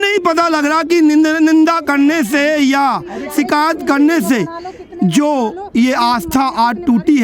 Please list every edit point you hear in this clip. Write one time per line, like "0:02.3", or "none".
none